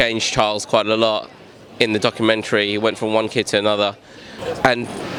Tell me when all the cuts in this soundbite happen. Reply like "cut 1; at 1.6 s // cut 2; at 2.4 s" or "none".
none